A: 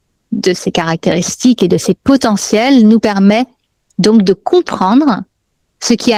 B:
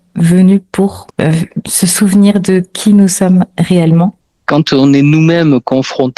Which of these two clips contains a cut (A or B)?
B